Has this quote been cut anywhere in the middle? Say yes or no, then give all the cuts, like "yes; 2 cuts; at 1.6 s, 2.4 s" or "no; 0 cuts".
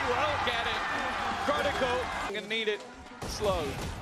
no; 0 cuts